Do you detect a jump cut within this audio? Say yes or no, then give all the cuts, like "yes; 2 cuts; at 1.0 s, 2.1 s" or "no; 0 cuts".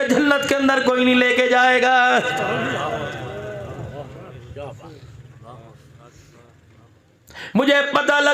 yes; 1 cut; at 6.6 s